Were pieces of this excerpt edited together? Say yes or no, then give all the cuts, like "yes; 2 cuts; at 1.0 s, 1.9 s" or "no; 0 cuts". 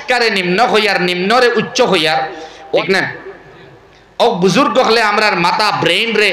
yes; 1 cut; at 2.8 s